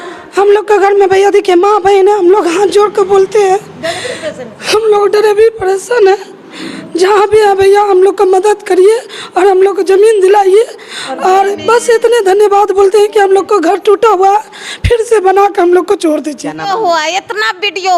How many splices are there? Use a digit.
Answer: 1